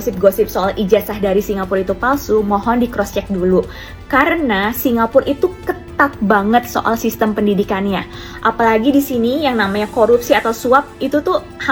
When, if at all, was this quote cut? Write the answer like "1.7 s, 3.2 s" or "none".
none

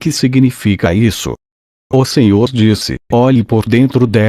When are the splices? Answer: 2.1 s

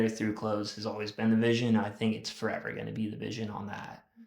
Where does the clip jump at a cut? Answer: none

